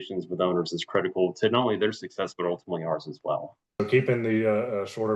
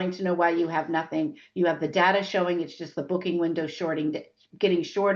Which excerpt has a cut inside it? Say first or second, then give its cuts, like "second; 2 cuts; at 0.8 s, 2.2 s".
first; 1 cut; at 3.8 s